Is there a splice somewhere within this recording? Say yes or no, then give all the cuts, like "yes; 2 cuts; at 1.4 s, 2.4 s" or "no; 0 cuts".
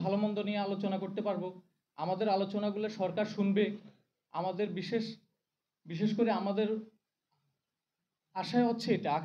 no; 0 cuts